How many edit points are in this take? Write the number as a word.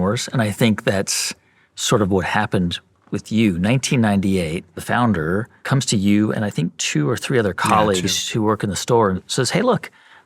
three